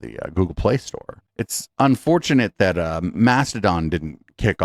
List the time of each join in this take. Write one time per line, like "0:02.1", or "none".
0:01.2